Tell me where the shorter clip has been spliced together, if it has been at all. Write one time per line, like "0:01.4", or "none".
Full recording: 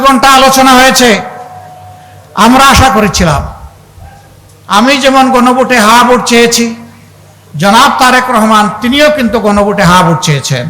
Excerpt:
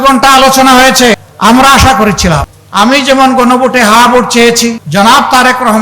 0:01.3
0:02.6
0:04.8